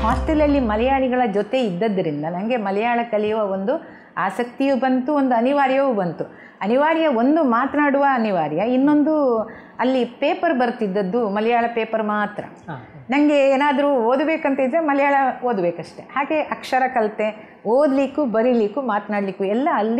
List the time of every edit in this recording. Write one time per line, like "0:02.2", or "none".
none